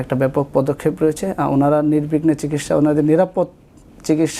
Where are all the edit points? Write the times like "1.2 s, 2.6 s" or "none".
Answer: none

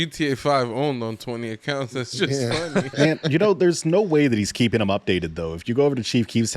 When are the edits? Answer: 2.9 s

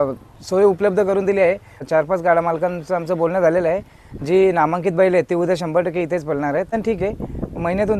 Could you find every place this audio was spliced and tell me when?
1.9 s, 6.7 s

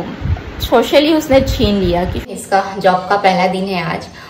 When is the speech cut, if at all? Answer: 2.3 s

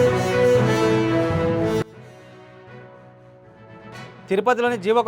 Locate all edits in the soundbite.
1.5 s

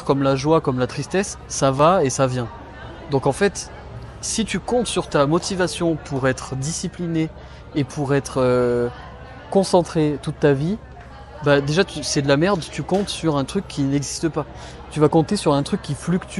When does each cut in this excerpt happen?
none

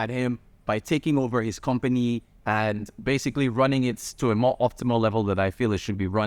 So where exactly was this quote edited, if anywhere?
none

